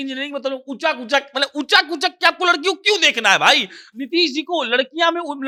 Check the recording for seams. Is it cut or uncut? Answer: uncut